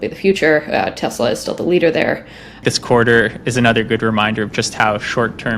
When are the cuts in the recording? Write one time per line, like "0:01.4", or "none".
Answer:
0:02.6

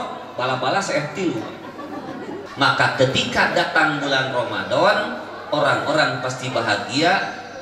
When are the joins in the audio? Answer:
0:02.4

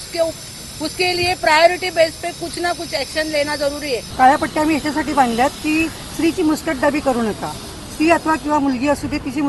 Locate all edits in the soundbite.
0:04.1

